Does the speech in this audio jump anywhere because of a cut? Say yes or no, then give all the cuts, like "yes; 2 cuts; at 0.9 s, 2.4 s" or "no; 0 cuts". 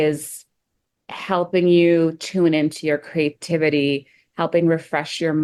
no; 0 cuts